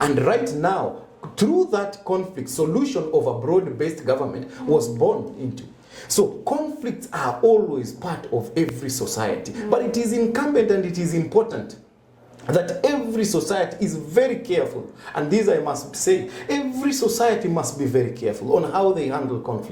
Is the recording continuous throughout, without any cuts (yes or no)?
yes